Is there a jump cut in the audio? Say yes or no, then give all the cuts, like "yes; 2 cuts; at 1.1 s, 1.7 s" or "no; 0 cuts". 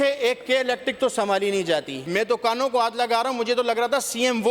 yes; 1 cut; at 2.0 s